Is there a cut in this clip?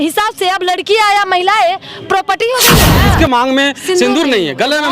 yes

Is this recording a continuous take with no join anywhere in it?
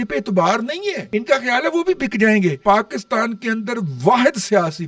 no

